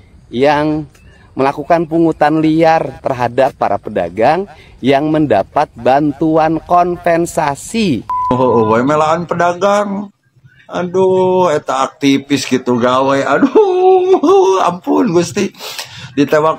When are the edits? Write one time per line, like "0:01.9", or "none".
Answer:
0:08.3